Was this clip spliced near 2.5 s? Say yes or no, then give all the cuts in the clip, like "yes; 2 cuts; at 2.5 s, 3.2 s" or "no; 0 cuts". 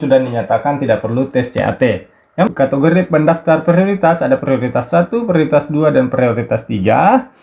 yes; 1 cut; at 2.5 s